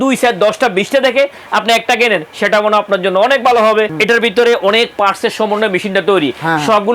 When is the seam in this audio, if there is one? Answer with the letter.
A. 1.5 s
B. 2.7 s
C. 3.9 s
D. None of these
C